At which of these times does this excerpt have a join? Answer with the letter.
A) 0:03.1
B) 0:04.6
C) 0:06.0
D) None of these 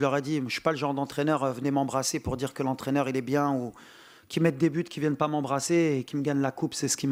D